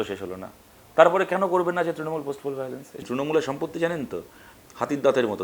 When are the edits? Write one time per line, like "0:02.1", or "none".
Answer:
0:02.9